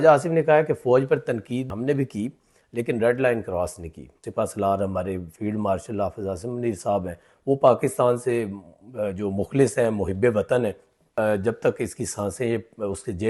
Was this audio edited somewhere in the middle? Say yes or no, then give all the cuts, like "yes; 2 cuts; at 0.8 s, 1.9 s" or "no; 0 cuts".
yes; 2 cuts; at 4.2 s, 11.0 s